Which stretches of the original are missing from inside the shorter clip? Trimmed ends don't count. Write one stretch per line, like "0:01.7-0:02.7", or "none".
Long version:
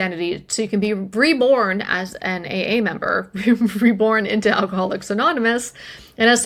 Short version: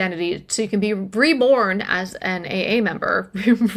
none